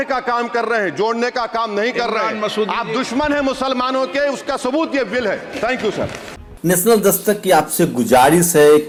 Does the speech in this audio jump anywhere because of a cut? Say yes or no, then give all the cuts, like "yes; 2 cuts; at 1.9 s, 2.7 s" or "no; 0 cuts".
no; 0 cuts